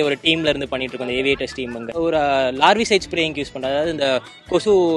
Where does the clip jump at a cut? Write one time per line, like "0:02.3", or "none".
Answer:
0:01.9